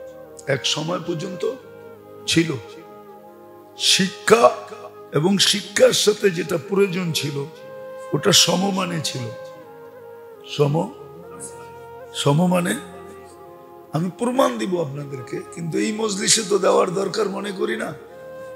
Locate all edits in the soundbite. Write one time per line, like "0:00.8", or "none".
none